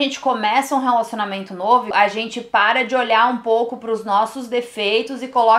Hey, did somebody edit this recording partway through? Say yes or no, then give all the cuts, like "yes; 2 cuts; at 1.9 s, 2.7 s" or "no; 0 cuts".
yes; 1 cut; at 1.9 s